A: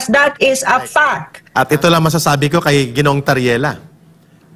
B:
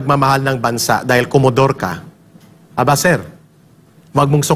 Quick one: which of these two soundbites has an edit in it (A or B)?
A